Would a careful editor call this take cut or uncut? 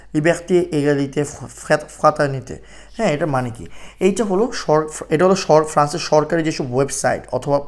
uncut